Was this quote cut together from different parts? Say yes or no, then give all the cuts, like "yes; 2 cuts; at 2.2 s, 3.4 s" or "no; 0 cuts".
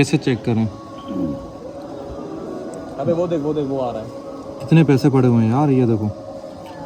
no; 0 cuts